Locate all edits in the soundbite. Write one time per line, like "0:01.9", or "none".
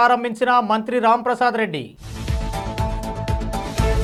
none